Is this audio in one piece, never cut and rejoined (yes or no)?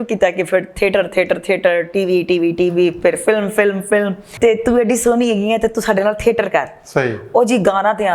no